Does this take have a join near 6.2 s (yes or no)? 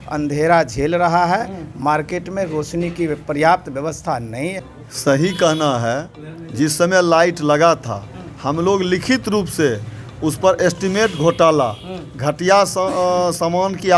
no